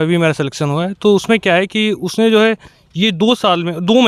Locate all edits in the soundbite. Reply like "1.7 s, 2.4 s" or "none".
none